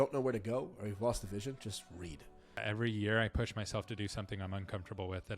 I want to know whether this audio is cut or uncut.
cut